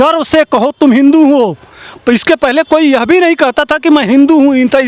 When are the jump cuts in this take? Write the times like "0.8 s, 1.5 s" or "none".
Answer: none